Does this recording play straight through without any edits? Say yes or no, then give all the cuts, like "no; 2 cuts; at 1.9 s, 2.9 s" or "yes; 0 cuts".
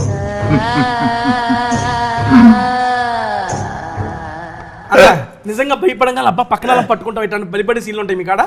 no; 1 cut; at 4.8 s